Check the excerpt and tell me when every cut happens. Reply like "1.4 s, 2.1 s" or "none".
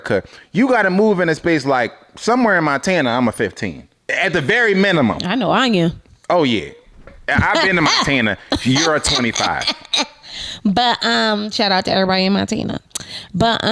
none